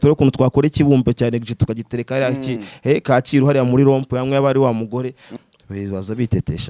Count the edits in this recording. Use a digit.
1